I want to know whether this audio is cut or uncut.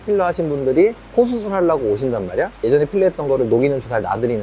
cut